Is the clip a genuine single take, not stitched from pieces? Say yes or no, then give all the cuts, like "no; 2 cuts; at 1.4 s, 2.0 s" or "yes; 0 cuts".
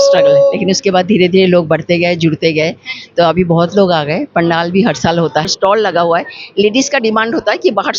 no; 1 cut; at 5.5 s